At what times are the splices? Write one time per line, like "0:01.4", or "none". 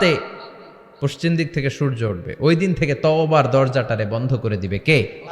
none